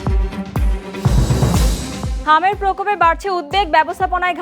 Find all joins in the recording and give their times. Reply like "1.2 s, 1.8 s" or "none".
2.1 s